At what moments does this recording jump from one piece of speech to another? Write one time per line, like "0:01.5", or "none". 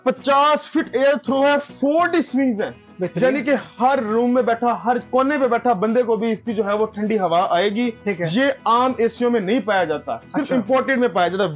none